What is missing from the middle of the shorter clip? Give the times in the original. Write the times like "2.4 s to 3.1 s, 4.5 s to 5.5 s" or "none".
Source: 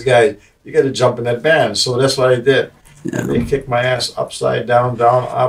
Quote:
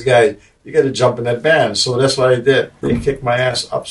2.8 s to 3.2 s